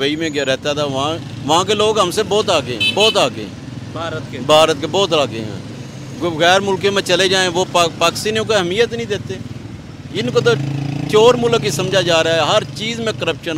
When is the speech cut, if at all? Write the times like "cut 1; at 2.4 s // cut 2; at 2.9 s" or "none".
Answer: none